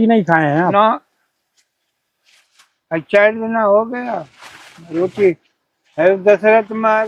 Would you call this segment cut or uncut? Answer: uncut